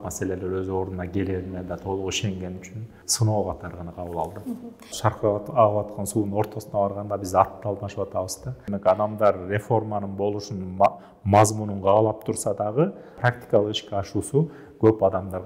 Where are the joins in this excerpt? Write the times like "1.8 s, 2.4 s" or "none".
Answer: 3.0 s, 4.9 s, 8.7 s, 13.1 s